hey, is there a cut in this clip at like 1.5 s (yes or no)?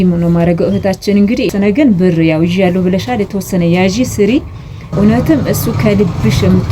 yes